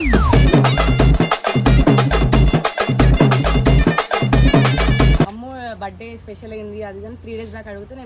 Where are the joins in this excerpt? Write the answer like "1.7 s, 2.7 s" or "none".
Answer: 5.3 s